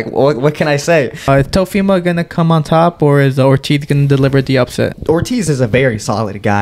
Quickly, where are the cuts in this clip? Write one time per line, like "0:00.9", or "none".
0:01.3
0:05.0